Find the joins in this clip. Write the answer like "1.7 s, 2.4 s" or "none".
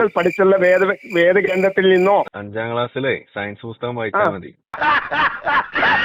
2.3 s